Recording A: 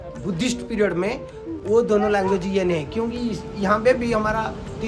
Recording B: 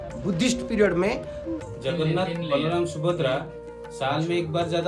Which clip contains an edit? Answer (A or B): B